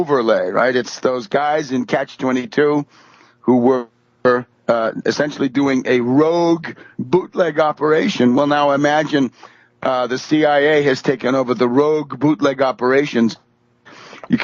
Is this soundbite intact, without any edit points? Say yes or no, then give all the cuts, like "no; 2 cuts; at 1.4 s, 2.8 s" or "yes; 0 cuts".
no; 1 cut; at 10.9 s